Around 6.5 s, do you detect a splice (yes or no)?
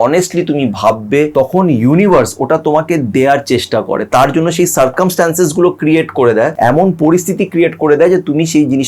yes